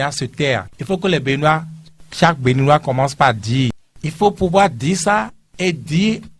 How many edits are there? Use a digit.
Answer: 1